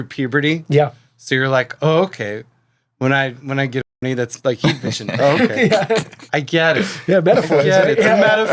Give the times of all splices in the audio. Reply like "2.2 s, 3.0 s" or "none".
none